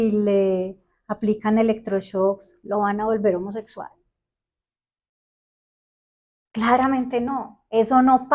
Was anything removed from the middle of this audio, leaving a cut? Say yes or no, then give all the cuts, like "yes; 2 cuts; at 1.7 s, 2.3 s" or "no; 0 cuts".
no; 0 cuts